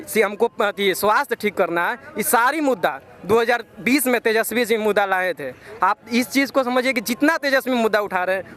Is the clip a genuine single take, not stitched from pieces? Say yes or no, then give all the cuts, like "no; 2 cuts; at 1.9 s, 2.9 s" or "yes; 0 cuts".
yes; 0 cuts